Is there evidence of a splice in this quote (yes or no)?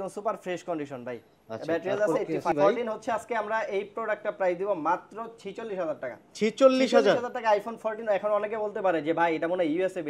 yes